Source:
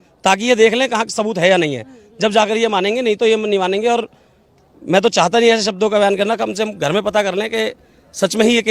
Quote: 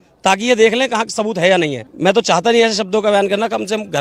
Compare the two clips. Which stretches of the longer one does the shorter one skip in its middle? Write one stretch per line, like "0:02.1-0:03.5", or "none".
0:01.8-0:04.7